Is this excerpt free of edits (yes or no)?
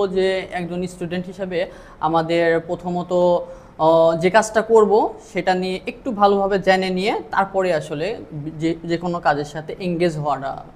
yes